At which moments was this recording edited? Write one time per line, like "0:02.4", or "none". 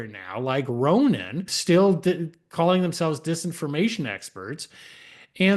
0:01.5